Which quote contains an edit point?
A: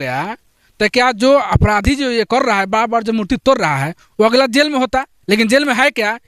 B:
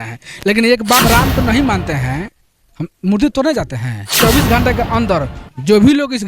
B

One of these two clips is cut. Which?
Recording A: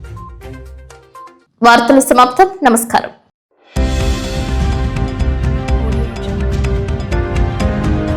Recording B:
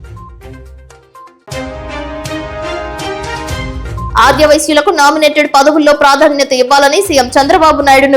B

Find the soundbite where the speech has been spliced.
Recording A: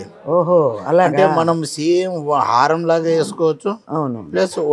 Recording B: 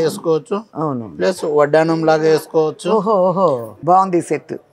B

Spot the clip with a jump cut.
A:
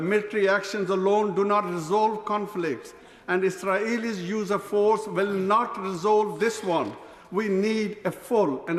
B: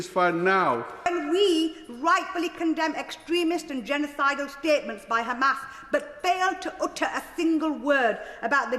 B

